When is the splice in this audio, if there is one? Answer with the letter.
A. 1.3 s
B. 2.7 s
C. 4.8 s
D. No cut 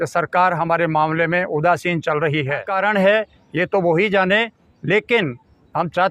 B